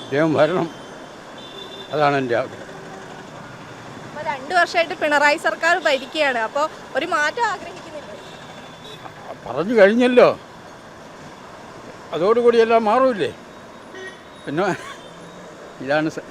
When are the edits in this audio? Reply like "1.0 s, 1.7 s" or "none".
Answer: none